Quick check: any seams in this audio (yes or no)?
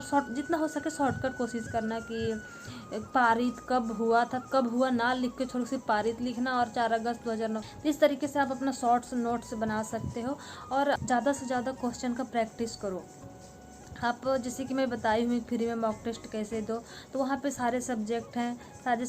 yes